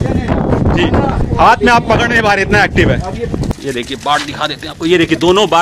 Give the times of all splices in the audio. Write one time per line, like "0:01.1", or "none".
0:03.5

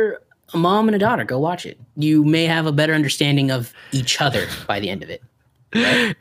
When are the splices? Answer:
0:01.8

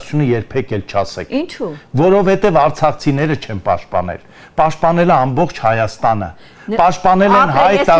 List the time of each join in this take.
none

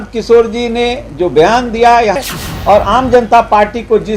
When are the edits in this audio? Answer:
0:02.2

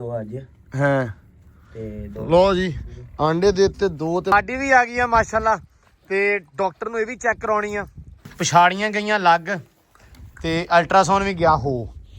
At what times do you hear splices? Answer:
0:04.3
0:08.3

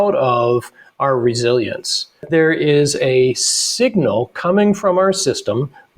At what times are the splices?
0:02.2

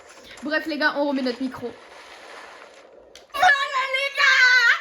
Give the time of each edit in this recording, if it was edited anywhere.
0:03.3

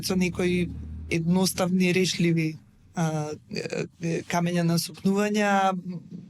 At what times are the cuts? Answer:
none

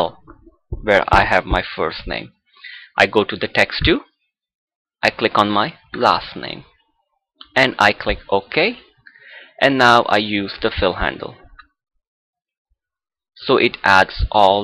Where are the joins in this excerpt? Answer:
none

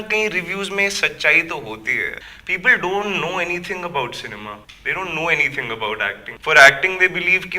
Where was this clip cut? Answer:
0:02.2

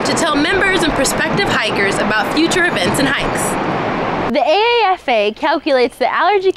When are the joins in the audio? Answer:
0:04.3

